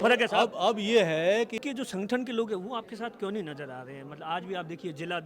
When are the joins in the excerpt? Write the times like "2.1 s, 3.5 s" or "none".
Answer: 1.6 s